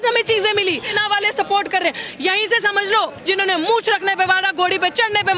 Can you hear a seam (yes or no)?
yes